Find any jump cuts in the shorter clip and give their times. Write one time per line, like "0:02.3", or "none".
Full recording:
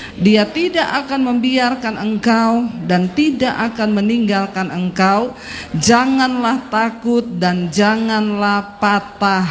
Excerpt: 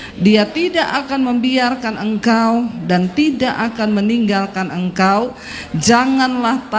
none